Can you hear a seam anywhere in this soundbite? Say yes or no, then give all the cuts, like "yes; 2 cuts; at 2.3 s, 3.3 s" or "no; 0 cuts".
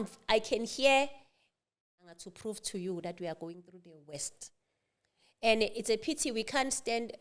yes; 1 cut; at 2.0 s